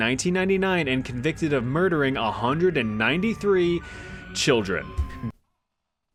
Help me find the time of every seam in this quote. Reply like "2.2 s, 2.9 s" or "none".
none